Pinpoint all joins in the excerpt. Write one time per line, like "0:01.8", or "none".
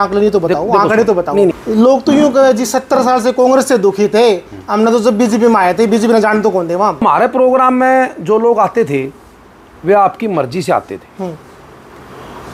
0:01.6
0:07.0